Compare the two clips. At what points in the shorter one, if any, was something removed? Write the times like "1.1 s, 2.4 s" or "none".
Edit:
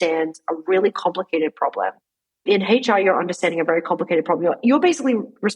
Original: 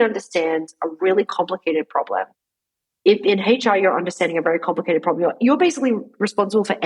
2.4 s